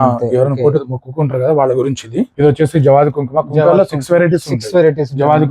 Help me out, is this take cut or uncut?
cut